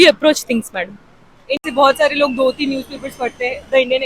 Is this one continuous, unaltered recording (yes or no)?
no